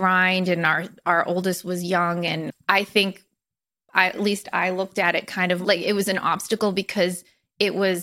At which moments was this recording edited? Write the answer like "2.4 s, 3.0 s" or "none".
2.5 s, 5.6 s